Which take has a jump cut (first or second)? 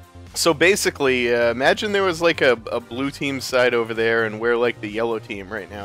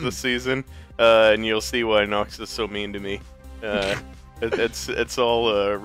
second